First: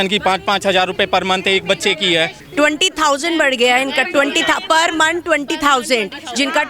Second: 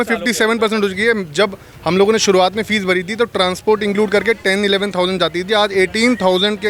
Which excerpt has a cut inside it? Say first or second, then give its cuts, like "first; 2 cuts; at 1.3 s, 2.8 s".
first; 1 cut; at 2.4 s